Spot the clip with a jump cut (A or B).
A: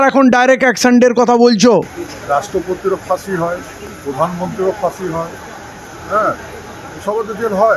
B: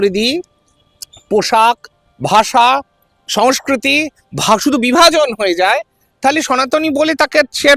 A